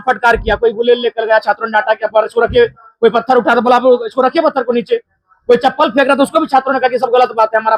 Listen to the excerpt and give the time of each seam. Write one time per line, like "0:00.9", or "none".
none